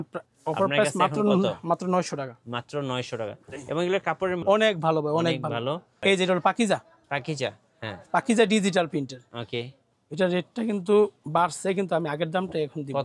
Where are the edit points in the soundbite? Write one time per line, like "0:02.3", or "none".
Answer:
0:04.4
0:05.9